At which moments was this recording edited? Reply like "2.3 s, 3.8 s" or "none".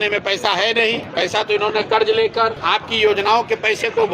1.0 s, 2.6 s